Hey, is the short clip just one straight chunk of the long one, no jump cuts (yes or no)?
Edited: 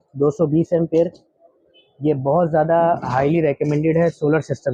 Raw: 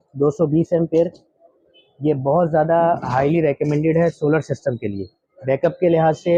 yes